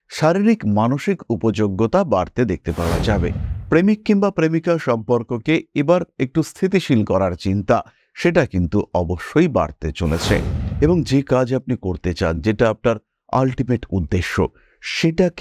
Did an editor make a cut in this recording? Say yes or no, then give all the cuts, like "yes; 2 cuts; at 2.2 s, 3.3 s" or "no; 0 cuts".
yes; 2 cuts; at 3.5 s, 10.6 s